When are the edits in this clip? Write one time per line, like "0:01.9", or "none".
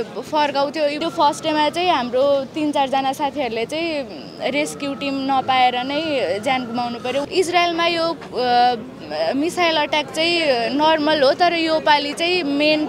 0:01.0
0:07.2